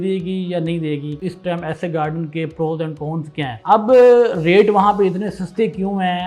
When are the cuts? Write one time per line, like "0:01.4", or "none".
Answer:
0:01.2
0:03.5